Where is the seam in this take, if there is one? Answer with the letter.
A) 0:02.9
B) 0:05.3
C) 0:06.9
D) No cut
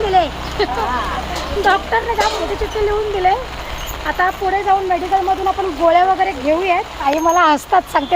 C